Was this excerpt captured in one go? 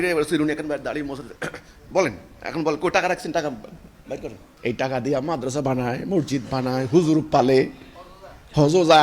no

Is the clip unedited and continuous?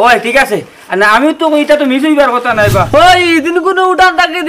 no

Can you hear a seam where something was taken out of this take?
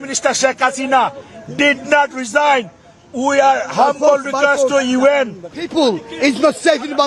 yes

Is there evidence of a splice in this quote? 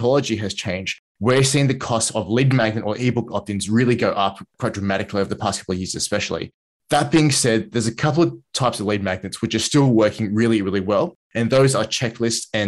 no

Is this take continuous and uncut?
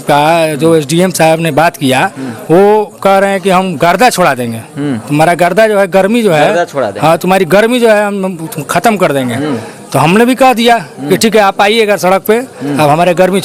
yes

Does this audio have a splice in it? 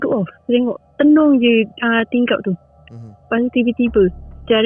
no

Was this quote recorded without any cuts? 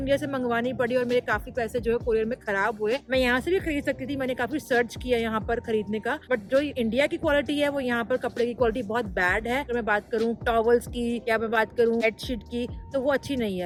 yes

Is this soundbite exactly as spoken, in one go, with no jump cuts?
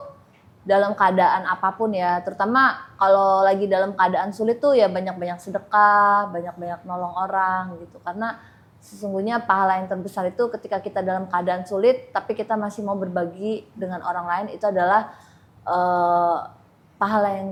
yes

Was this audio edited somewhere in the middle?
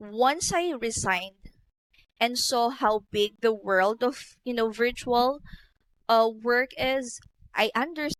no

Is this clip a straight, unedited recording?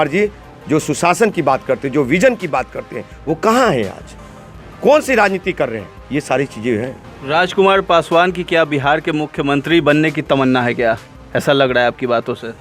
yes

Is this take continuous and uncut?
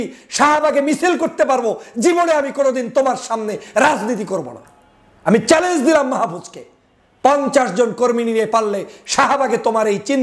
yes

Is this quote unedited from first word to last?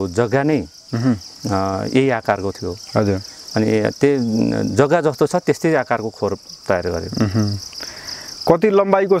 yes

